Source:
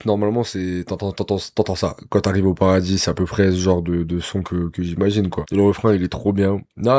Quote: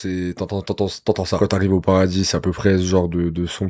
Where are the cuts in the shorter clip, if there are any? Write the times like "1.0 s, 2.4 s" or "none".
1.4 s